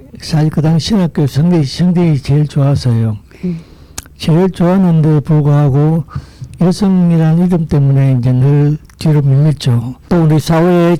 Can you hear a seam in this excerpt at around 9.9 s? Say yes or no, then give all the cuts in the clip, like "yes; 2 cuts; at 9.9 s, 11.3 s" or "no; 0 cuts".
yes; 1 cut; at 9.9 s